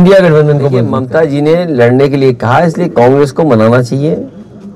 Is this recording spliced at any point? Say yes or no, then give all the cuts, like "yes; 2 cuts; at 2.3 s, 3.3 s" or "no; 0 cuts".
yes; 1 cut; at 1.0 s